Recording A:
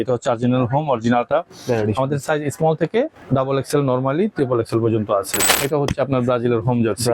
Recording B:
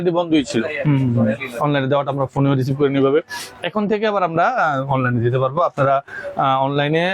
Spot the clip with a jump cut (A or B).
A